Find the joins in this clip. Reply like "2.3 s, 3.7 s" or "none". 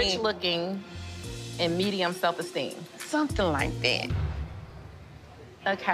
4.0 s

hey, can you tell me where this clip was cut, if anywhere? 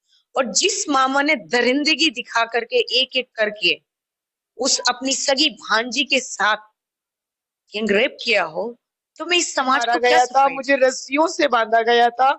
9.8 s

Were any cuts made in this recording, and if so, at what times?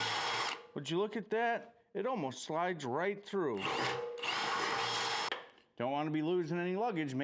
5.3 s

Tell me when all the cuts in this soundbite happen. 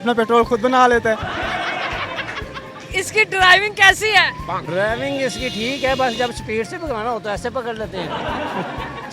2.8 s

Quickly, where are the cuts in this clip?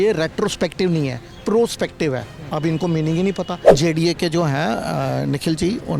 3.6 s

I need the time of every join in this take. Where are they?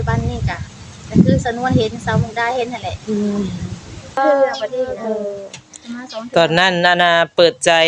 4.2 s

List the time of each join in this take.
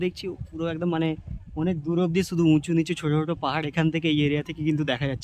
none

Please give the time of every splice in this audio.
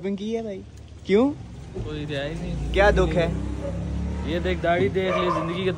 none

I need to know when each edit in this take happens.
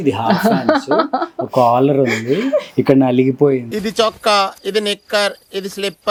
none

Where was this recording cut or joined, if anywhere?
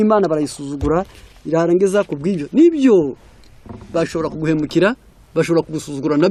none

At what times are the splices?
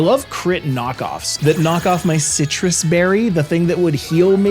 1.3 s

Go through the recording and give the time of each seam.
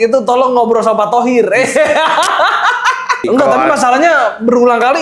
3.2 s

